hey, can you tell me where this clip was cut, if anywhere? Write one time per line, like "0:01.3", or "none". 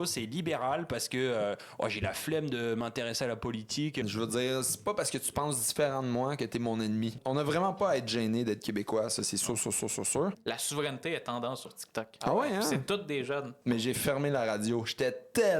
0:04.0
0:07.2
0:10.4
0:13.5

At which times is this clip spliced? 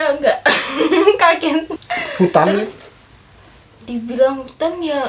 0:01.7

